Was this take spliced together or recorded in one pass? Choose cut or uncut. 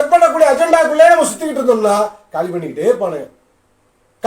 uncut